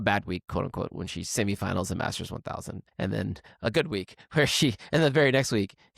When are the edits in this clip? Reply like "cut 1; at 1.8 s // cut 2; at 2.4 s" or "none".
cut 1; at 2.8 s